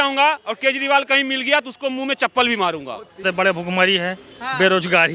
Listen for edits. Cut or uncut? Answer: cut